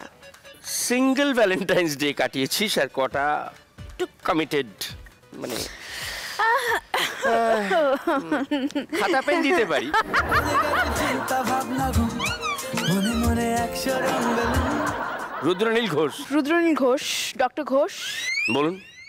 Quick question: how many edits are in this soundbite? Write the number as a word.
two